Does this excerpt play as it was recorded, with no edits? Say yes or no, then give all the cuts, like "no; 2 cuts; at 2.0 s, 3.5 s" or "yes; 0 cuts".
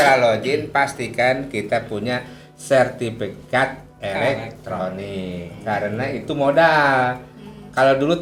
yes; 0 cuts